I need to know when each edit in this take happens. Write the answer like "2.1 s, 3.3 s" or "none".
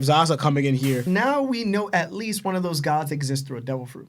1.0 s